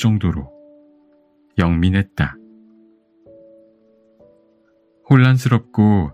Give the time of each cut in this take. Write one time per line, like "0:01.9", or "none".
0:02.3
0:05.0